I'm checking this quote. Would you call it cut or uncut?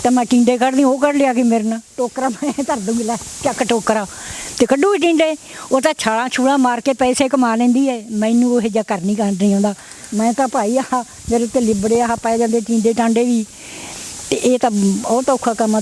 uncut